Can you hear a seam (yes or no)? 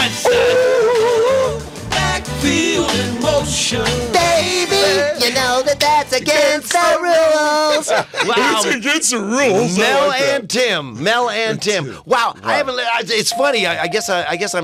no